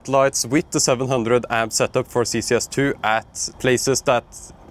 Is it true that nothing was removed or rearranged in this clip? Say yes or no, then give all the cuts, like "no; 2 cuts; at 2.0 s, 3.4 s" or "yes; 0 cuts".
no; 1 cut; at 3.4 s